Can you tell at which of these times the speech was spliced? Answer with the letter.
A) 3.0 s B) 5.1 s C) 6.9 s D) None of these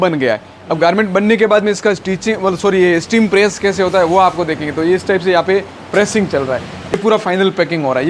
C